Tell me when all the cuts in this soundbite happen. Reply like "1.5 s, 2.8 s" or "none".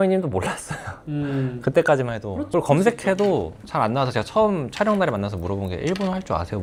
none